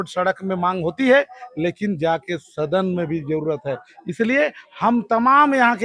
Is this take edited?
no; 0 cuts

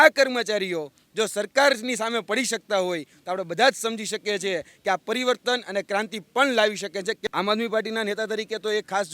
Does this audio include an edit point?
yes; 1 cut; at 7.2 s

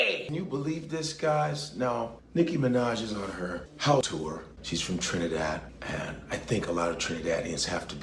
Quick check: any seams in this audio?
yes; 1 cut; at 4.2 s

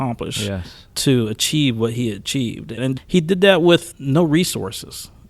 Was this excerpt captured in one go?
no; 1 cut; at 2.8 s

